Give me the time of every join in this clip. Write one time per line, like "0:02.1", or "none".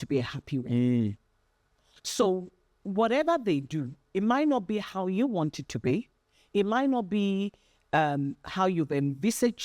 none